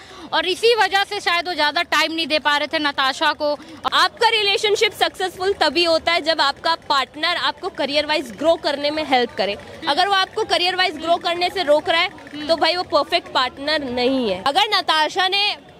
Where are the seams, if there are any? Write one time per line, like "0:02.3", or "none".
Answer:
0:03.7
0:14.5